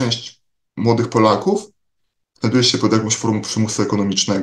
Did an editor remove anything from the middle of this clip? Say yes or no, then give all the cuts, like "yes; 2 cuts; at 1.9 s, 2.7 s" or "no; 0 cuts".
no; 0 cuts